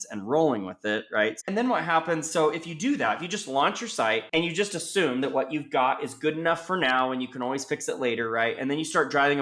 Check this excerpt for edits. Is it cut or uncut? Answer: cut